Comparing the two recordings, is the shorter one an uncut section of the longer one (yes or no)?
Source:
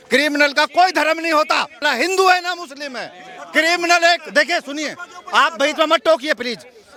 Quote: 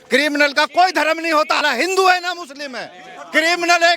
no